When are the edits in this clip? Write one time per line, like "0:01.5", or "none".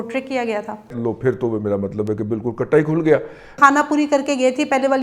0:01.0
0:03.6